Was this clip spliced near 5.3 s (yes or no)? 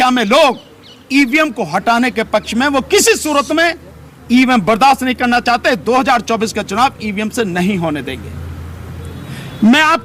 no